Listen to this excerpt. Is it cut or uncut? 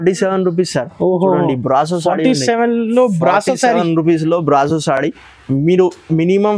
uncut